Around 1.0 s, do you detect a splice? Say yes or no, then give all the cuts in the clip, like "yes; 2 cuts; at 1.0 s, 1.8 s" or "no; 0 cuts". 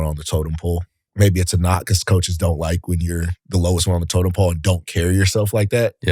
yes; 1 cut; at 1.0 s